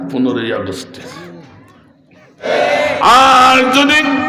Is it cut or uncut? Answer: cut